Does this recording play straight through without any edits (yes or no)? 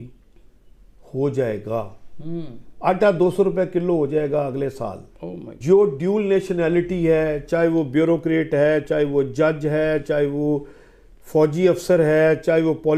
no